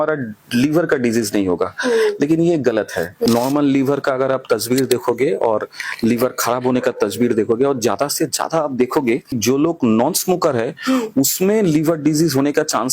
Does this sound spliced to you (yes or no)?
yes